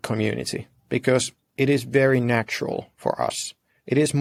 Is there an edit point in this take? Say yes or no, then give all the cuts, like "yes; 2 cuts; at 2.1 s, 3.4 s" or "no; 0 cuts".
no; 0 cuts